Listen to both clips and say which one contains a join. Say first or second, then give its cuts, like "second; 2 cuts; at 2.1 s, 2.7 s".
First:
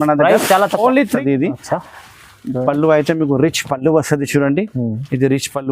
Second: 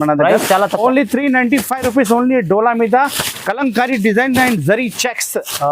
first; 1 cut; at 1.2 s